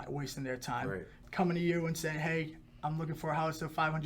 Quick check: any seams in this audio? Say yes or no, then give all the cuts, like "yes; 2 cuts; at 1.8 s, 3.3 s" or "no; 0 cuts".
yes; 1 cut; at 1.2 s